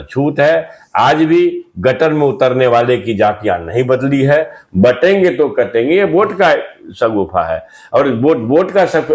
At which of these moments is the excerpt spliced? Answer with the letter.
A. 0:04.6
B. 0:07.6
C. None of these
A